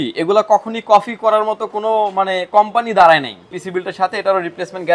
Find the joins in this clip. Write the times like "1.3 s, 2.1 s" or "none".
3.6 s